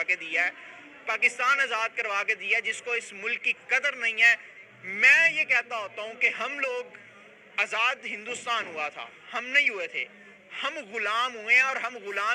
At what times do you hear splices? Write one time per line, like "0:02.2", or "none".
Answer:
none